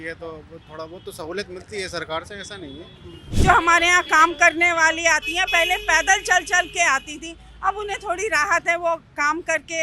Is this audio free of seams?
no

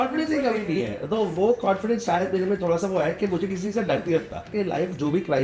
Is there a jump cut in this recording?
yes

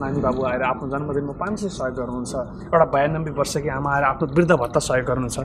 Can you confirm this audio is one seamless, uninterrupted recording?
yes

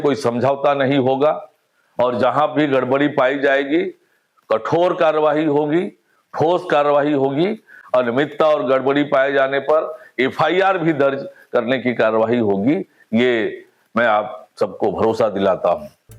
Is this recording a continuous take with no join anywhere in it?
yes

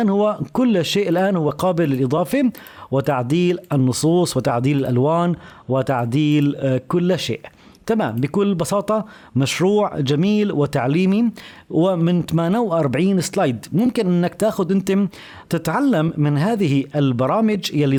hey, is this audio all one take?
yes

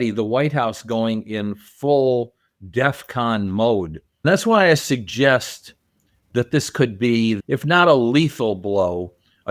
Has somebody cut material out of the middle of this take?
yes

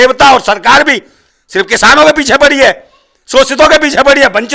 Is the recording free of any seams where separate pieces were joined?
yes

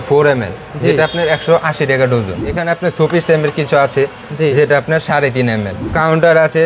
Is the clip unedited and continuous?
no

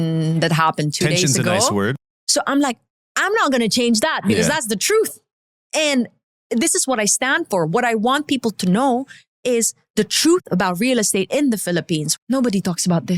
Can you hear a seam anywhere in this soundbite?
yes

